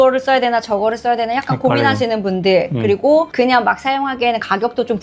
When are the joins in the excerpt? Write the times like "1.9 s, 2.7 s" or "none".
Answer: none